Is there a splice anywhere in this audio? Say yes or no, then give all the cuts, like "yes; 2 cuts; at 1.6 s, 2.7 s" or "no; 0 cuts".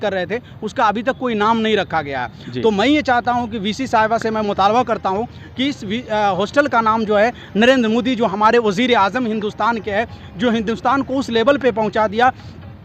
no; 0 cuts